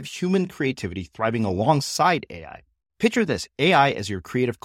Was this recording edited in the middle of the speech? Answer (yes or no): no